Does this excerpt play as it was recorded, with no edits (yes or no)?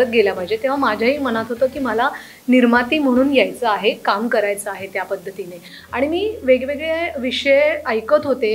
yes